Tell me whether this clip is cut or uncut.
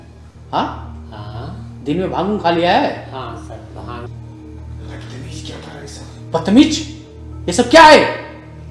cut